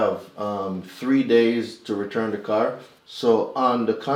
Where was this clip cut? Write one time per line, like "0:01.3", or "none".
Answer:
0:02.9